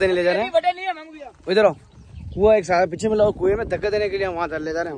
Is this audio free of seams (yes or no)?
yes